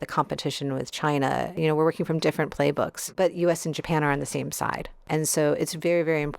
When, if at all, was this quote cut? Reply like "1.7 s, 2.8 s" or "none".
1.5 s, 3.0 s, 5.0 s